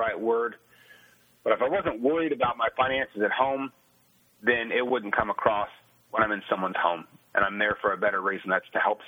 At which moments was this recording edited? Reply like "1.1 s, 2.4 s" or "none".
none